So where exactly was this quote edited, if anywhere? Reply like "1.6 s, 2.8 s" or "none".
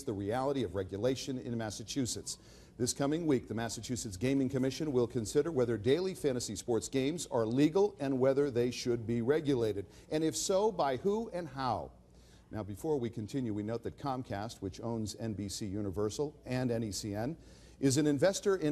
4.9 s